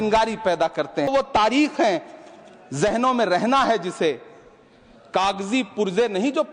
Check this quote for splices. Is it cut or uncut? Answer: cut